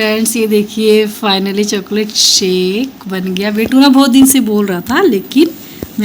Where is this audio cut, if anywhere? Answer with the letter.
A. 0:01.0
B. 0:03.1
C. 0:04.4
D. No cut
D